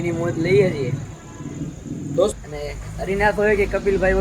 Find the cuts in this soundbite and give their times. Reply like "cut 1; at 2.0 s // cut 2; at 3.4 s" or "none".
cut 1; at 2.3 s